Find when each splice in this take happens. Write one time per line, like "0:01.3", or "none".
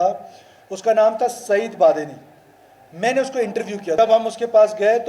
0:04.0